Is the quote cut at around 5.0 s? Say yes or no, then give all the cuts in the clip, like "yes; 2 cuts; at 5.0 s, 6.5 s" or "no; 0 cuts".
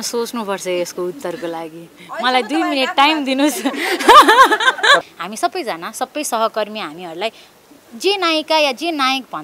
yes; 1 cut; at 5.0 s